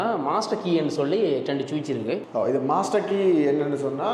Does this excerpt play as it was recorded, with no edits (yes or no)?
no